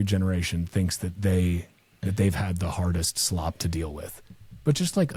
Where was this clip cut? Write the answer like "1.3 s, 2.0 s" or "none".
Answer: none